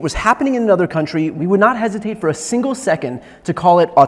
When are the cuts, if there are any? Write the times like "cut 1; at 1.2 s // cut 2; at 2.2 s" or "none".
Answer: cut 1; at 1.3 s